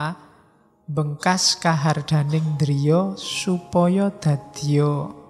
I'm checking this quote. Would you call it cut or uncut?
uncut